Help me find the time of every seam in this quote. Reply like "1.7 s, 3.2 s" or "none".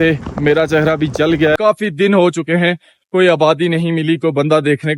1.5 s

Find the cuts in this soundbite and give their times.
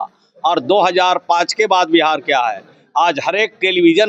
none

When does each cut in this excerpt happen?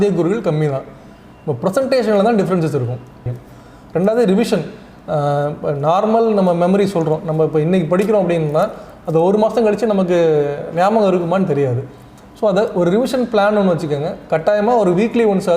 3.2 s

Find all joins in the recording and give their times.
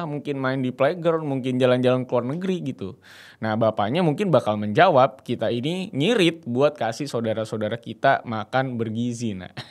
none

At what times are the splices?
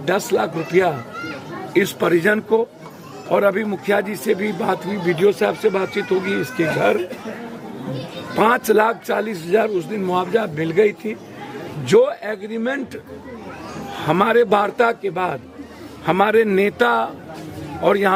none

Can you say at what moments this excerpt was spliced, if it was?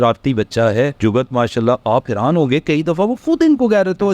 0.9 s

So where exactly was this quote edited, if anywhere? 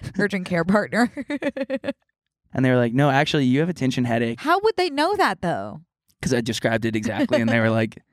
2.4 s

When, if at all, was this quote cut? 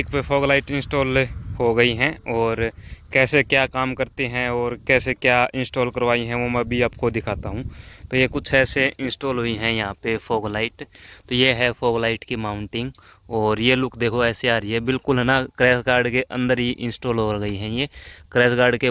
none

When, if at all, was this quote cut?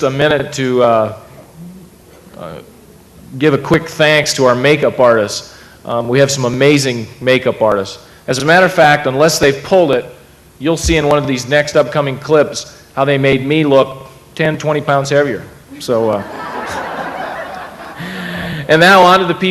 none

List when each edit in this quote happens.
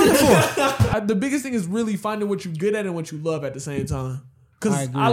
0.9 s

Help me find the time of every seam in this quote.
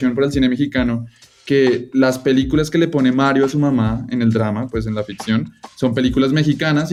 none

